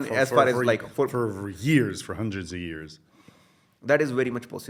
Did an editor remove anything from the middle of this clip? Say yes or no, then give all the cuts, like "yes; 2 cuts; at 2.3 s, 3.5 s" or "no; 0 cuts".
no; 0 cuts